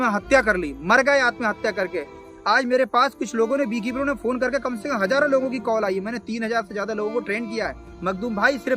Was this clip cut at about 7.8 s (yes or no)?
yes